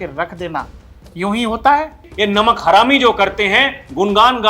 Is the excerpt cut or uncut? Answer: cut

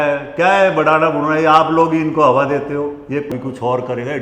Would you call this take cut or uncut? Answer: cut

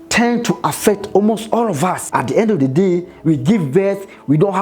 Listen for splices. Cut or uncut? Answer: cut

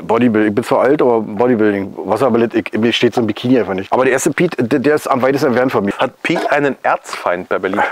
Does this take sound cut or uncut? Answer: cut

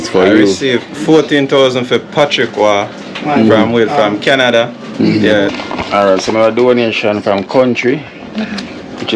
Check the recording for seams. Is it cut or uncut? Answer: cut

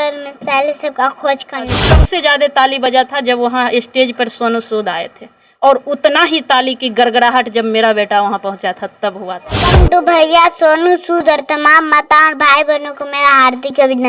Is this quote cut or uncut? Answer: cut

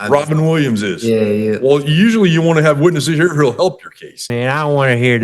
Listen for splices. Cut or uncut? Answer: cut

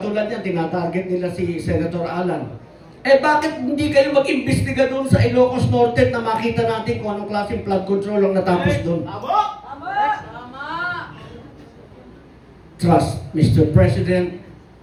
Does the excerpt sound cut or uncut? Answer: uncut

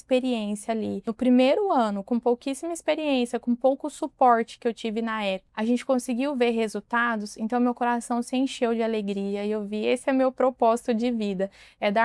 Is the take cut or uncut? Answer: cut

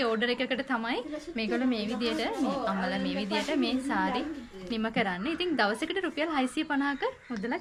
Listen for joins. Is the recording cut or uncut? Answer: uncut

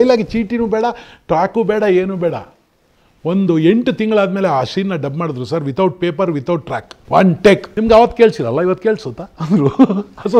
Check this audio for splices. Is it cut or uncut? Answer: cut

